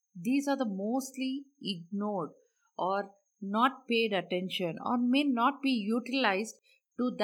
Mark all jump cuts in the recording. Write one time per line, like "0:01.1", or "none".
none